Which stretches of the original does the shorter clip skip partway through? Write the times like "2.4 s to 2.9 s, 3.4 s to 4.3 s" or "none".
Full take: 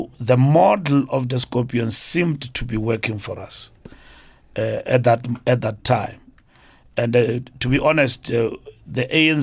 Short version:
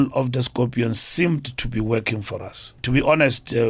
3.7 s to 7.5 s